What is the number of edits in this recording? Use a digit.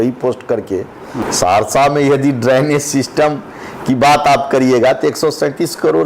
1